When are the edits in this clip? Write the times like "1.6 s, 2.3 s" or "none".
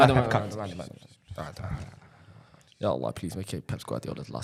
none